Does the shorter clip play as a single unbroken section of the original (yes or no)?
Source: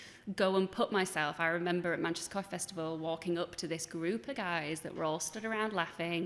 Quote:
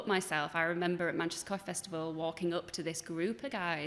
yes